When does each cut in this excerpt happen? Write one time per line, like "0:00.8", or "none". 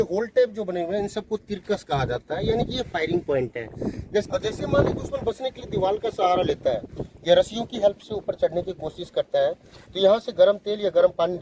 0:04.3